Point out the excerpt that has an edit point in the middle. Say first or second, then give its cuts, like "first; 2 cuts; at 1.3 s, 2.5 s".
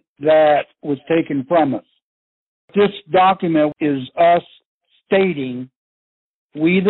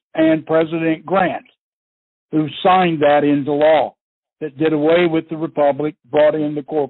first; 2 cuts; at 2.7 s, 3.7 s